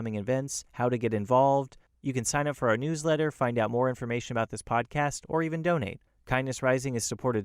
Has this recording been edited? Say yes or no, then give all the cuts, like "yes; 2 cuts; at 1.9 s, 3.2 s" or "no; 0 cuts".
no; 0 cuts